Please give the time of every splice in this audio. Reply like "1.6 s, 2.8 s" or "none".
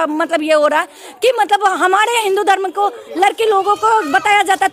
none